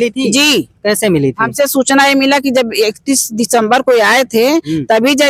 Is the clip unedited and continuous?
yes; 0 cuts

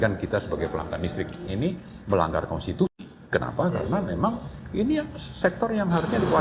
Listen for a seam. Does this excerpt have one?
yes; 1 cut; at 1.5 s

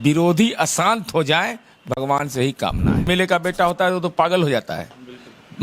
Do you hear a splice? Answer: yes; 1 cut; at 3.1 s

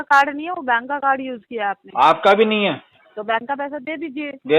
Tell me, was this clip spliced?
yes; 1 cut; at 3.0 s

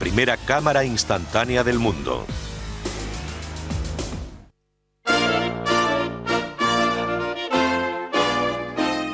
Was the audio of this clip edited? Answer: no; 0 cuts

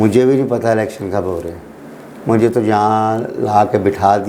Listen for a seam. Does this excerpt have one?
no; 0 cuts

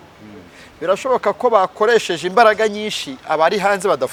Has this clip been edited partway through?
no; 0 cuts

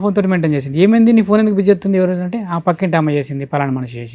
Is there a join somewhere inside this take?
no; 0 cuts

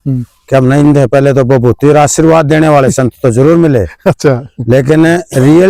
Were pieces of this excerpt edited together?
no; 0 cuts

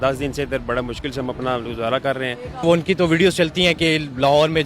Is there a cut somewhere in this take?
yes; 1 cut; at 2.6 s

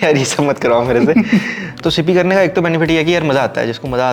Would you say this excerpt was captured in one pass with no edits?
no; 1 cut; at 1.7 s

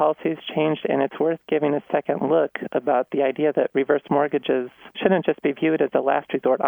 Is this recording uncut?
no; 1 cut; at 4.8 s

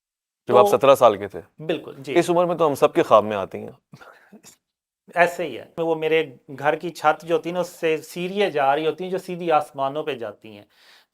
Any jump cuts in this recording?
yes; 1 cut; at 5.8 s

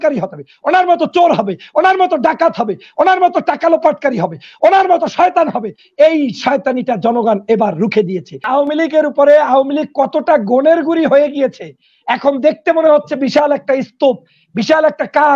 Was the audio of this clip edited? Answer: yes; 1 cut; at 8.5 s

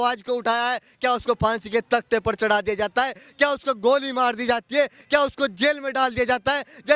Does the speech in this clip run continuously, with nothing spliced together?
yes; 0 cuts

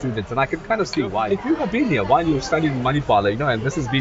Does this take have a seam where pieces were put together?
yes; 1 cut; at 1.2 s

